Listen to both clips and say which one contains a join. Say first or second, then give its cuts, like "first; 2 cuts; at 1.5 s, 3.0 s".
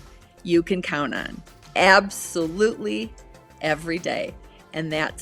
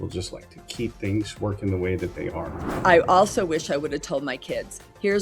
second; 1 cut; at 2.7 s